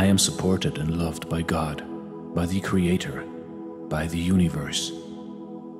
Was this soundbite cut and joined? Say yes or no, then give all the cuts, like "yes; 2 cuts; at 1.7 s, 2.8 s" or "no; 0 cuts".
no; 0 cuts